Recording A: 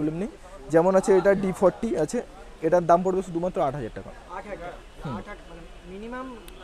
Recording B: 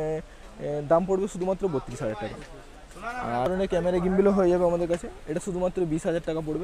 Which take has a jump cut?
B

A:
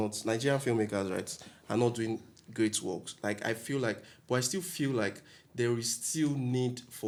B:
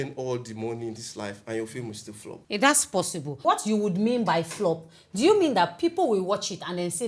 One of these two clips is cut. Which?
B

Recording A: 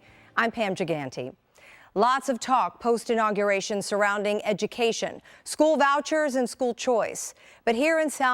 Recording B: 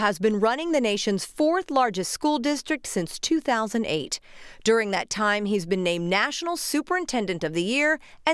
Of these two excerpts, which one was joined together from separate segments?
A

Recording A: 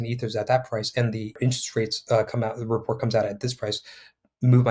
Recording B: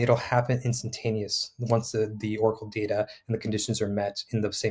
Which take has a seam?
A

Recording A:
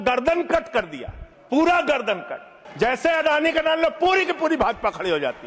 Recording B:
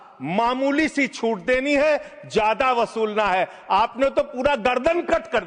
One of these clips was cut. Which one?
A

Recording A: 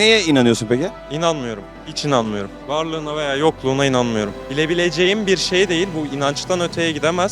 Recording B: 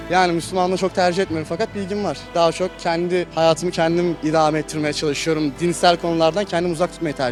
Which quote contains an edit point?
A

